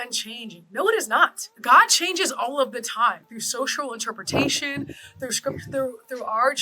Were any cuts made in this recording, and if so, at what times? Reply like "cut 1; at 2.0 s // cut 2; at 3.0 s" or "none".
cut 1; at 1.5 s

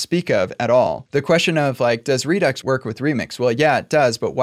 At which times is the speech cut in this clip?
cut 1; at 1.0 s // cut 2; at 2.6 s

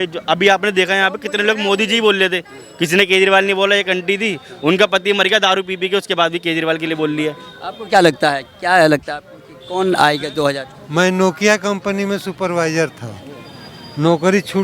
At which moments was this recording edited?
none

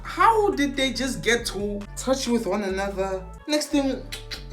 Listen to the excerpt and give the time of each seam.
cut 1; at 1.9 s // cut 2; at 3.3 s

